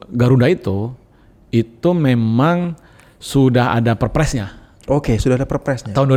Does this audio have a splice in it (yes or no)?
no